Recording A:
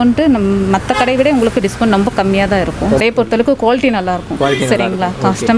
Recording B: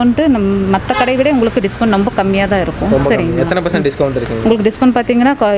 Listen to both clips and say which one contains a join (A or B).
A